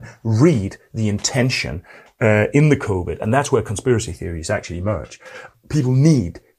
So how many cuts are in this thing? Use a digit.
1